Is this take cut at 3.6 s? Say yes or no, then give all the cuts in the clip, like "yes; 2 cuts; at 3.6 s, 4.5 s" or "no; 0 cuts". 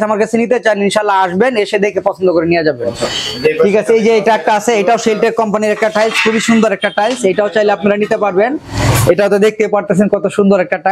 no; 0 cuts